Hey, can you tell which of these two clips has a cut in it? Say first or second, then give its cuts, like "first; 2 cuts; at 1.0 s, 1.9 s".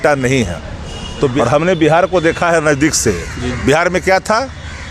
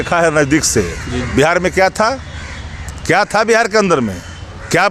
first; 1 cut; at 1.3 s